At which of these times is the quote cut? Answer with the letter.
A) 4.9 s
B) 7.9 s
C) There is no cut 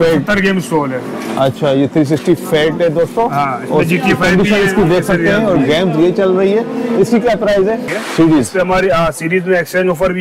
B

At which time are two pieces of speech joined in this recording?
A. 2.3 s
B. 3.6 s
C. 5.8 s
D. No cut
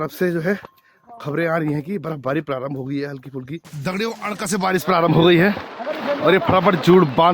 B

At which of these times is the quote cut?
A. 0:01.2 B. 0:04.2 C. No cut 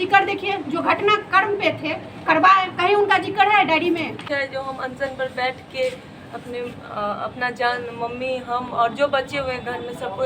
B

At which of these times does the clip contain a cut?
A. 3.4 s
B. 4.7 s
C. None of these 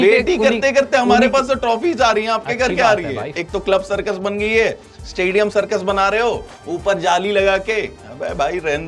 A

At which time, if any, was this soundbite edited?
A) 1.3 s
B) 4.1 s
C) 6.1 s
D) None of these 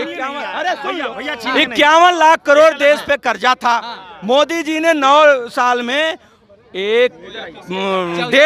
D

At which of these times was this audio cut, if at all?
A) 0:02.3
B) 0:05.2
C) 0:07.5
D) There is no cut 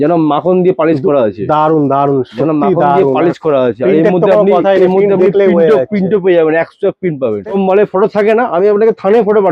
C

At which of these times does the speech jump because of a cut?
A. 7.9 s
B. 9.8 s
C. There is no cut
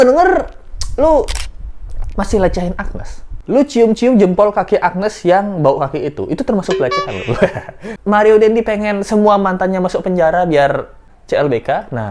A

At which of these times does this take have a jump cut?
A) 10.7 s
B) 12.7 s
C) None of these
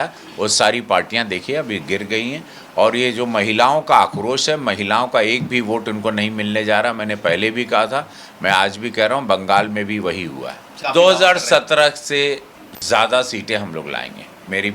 A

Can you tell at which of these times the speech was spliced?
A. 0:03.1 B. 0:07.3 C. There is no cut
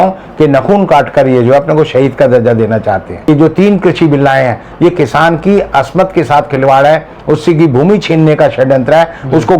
A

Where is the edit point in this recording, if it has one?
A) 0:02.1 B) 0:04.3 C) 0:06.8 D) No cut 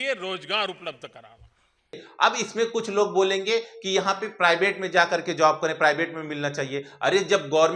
A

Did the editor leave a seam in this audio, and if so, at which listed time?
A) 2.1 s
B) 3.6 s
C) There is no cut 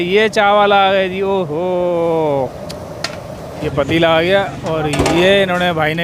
B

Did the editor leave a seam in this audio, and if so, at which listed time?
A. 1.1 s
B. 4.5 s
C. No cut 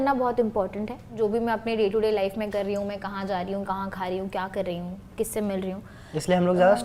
A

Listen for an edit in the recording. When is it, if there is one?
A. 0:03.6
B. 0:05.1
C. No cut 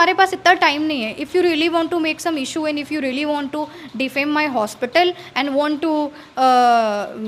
C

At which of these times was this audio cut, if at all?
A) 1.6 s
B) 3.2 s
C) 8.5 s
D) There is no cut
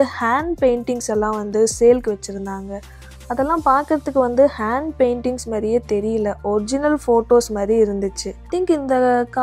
C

